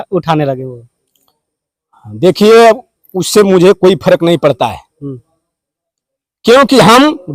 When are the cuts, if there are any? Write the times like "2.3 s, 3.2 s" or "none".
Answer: none